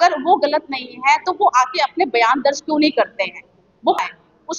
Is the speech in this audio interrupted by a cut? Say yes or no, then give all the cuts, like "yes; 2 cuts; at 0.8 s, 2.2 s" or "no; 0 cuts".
no; 0 cuts